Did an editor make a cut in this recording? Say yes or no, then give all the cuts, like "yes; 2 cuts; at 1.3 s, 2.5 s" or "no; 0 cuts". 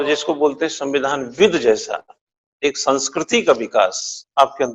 no; 0 cuts